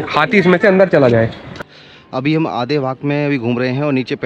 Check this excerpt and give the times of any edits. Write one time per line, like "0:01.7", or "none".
0:01.6